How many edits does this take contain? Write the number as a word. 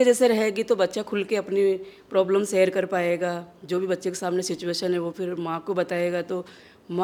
zero